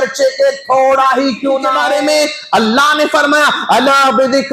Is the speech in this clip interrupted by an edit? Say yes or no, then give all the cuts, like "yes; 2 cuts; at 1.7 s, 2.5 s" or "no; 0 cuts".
yes; 1 cut; at 1.8 s